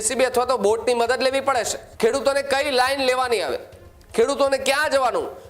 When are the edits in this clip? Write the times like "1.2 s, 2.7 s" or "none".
1.8 s